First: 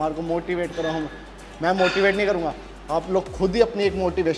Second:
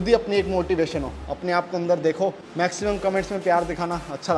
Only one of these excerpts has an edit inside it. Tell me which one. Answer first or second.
second